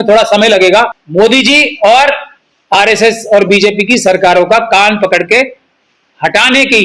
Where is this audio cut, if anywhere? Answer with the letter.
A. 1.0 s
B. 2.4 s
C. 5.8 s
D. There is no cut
A